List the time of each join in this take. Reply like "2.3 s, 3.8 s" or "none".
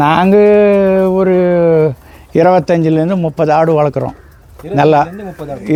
none